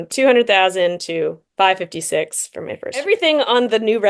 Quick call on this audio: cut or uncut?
cut